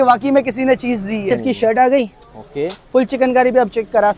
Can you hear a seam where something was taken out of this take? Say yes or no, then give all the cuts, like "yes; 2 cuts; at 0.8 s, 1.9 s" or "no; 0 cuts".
yes; 1 cut; at 1.3 s